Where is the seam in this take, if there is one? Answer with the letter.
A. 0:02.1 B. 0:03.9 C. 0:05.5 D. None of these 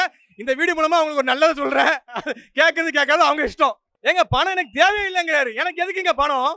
B